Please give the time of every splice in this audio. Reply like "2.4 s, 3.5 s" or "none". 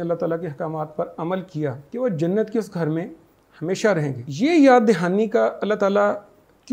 1.8 s, 4.2 s